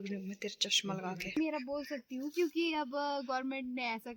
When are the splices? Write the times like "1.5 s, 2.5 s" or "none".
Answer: 1.4 s